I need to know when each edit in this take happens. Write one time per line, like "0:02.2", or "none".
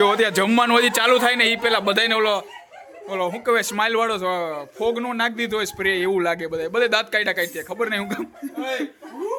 none